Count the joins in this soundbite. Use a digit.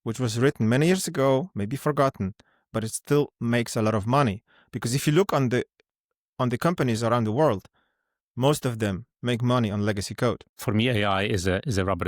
1